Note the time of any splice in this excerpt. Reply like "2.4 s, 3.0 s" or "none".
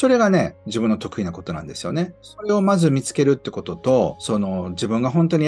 2.3 s, 4.2 s